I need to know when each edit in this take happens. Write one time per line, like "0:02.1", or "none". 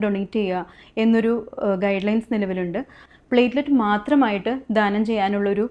0:03.0